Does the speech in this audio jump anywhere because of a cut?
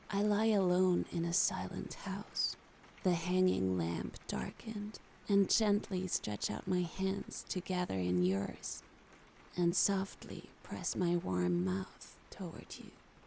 no; 0 cuts

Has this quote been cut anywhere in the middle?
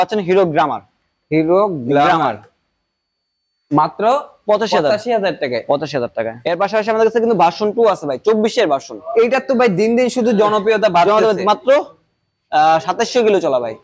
no; 0 cuts

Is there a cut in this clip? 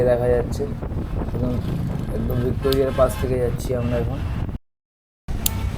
yes; 1 cut; at 4.6 s

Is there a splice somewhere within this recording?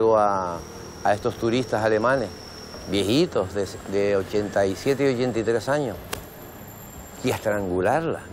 no; 0 cuts

